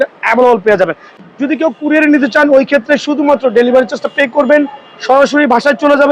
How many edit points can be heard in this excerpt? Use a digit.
1